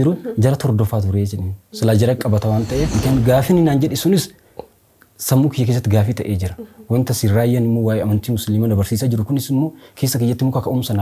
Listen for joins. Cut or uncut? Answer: cut